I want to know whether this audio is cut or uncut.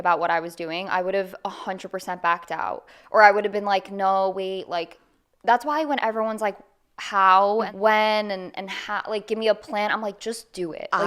cut